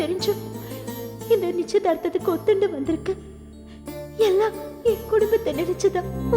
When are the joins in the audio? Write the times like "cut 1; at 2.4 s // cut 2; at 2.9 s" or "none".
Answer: none